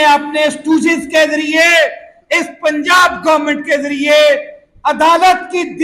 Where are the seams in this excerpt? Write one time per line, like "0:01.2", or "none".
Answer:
none

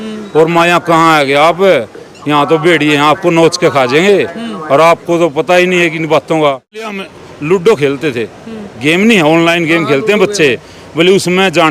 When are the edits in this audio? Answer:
0:07.0

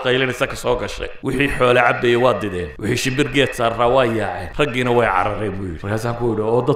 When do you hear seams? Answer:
0:01.1
0:02.7
0:04.4
0:05.7

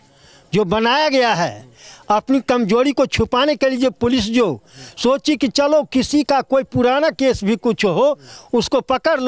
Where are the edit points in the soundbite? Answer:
none

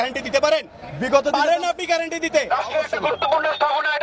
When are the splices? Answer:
0:02.5

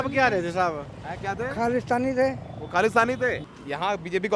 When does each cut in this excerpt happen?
0:03.4

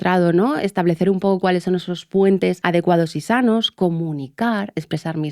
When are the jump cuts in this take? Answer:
0:02.6

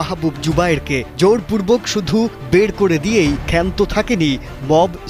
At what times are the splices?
none

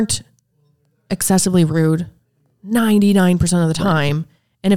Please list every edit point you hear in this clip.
none

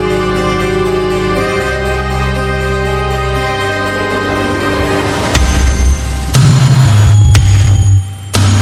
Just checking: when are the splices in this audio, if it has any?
none

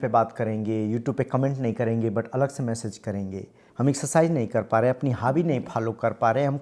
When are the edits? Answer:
0:03.6

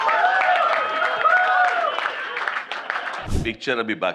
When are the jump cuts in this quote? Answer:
0:03.3

